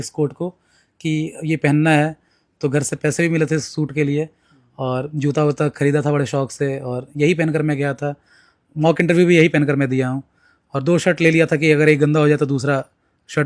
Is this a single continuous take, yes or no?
yes